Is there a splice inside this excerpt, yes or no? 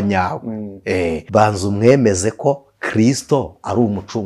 yes